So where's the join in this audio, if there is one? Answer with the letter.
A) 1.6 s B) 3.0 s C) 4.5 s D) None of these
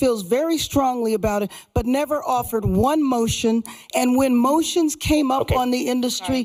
D